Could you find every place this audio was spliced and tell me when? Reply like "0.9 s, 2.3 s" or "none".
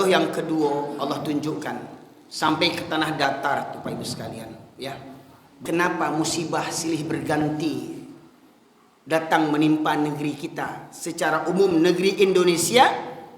5.6 s